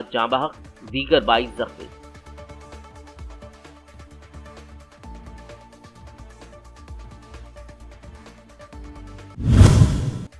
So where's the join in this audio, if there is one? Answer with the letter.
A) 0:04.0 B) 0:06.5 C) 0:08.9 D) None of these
D